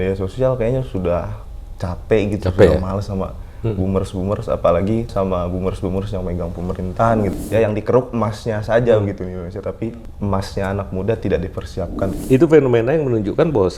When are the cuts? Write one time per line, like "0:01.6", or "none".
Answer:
0:05.1
0:07.3
0:10.1
0:12.2

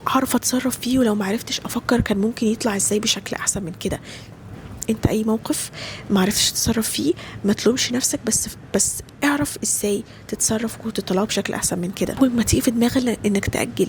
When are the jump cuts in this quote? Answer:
0:12.2

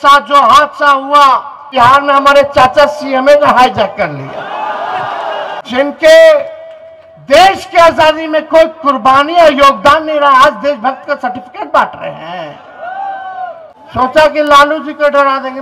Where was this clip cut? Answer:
0:01.6
0:05.6
0:13.7

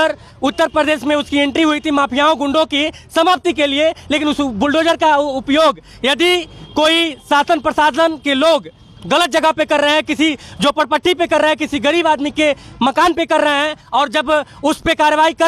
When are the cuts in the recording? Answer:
none

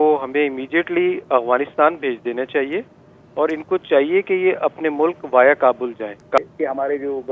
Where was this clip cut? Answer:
0:06.4

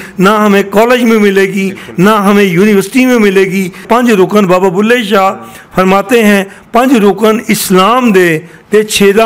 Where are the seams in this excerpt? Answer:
0:03.8

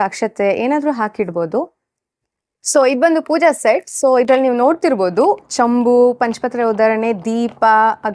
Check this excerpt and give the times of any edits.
none

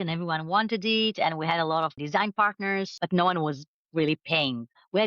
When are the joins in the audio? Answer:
0:02.0
0:02.9

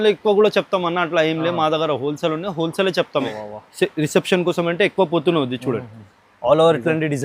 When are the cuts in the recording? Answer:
0:03.3

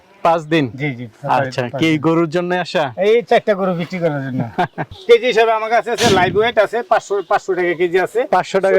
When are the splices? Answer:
0:04.9

